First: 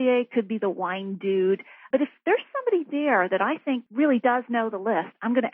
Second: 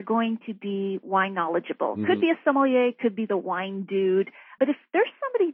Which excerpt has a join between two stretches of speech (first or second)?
first